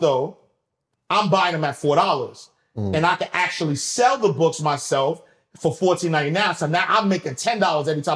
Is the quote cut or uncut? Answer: uncut